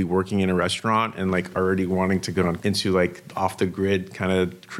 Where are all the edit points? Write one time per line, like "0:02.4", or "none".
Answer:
0:02.6